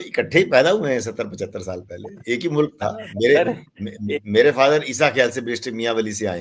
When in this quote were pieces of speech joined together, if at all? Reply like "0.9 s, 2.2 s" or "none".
none